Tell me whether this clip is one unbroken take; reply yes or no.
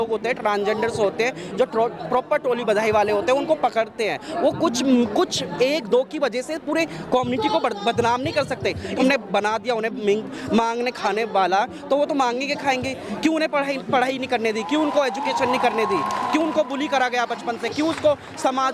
no